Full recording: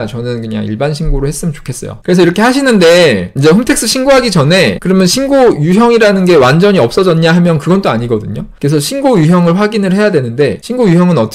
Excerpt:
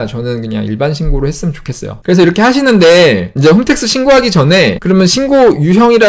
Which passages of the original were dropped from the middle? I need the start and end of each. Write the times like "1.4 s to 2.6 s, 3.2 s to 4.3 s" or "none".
none

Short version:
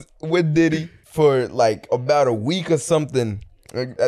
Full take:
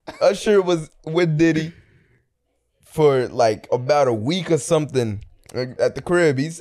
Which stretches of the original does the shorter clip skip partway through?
1.8 s to 2.8 s

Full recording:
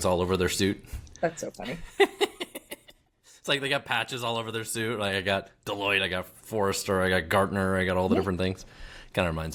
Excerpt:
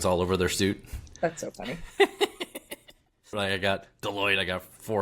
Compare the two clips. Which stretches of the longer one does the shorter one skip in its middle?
3.3 s to 5.0 s

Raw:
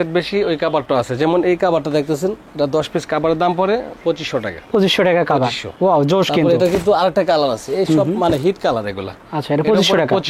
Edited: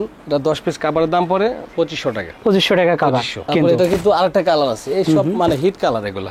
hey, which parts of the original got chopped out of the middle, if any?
5.8 s to 6.3 s

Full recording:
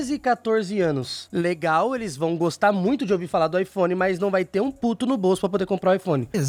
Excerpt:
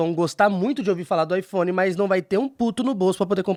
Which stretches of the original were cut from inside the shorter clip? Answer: none

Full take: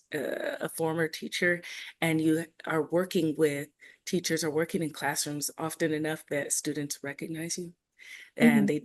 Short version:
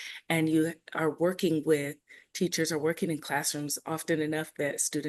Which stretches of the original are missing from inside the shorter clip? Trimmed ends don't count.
none

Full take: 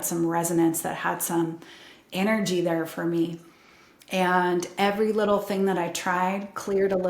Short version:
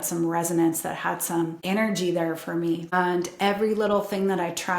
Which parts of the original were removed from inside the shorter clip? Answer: 1.6 s to 2.1 s, 3.4 s to 4.3 s

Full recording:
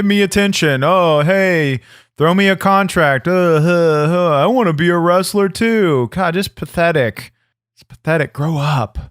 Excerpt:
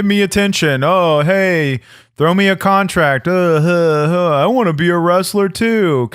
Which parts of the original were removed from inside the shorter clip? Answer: none

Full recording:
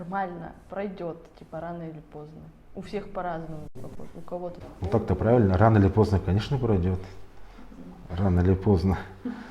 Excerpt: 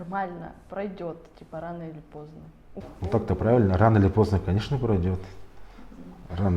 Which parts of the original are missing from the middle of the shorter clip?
2.8 s to 4.6 s

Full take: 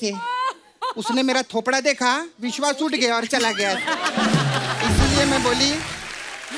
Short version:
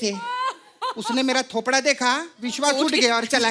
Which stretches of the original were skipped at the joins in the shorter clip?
none

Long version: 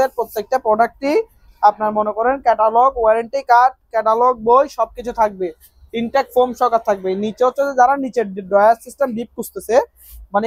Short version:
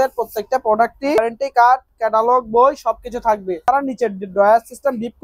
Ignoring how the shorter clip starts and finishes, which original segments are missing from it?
1.2 s to 3.1 s, 5.6 s to 7.8 s

